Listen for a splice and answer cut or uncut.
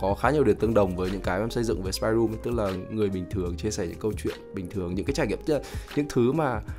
uncut